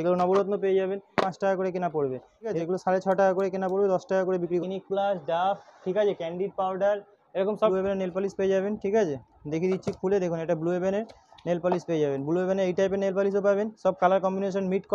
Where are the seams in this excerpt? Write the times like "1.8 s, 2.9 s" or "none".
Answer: 1.2 s, 2.6 s, 4.6 s, 7.7 s